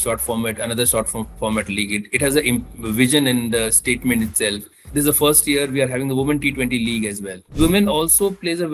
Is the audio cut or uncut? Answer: cut